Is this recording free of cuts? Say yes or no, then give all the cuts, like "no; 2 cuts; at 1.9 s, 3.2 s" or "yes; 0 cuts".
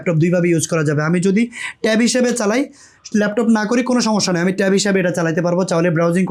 yes; 0 cuts